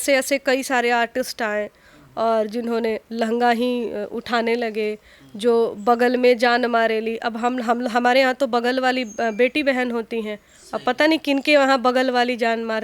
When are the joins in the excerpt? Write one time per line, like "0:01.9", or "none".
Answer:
none